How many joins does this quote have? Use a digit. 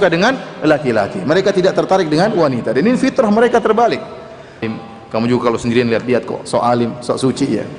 1